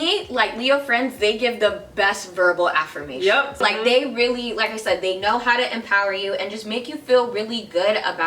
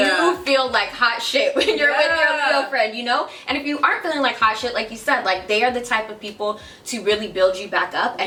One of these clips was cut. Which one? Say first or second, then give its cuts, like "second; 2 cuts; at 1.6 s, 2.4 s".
first; 1 cut; at 3.6 s